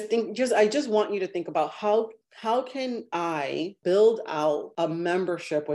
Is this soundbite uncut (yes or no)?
no